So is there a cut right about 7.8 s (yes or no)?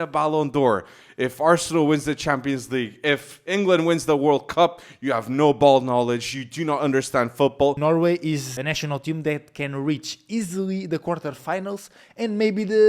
yes